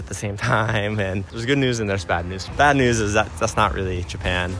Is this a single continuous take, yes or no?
no